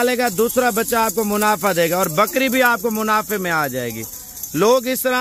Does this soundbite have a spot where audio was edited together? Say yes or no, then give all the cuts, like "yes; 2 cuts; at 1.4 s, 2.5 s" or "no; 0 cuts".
no; 0 cuts